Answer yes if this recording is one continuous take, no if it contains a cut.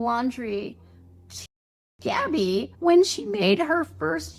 yes